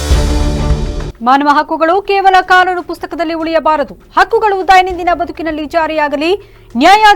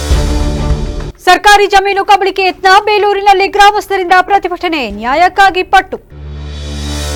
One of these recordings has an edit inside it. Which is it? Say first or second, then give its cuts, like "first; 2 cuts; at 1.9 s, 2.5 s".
first; 1 cut; at 1.0 s